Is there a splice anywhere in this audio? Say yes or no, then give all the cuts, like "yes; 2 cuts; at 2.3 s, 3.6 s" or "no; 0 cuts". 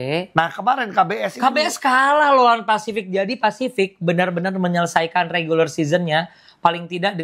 no; 0 cuts